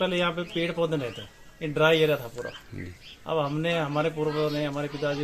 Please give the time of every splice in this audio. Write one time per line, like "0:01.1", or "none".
none